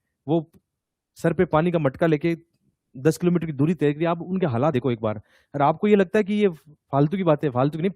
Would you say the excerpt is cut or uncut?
uncut